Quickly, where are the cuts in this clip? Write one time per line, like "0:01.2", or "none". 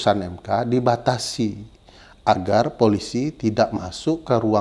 none